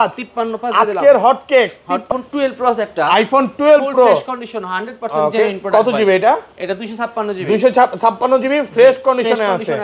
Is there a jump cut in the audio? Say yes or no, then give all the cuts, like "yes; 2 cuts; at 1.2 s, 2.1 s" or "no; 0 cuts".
yes; 1 cut; at 2.1 s